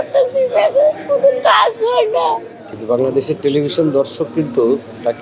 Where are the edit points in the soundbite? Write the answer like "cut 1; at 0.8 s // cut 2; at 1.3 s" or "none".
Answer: cut 1; at 2.6 s